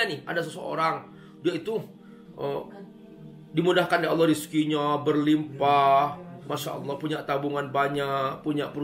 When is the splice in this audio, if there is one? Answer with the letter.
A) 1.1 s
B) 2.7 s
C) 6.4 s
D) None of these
D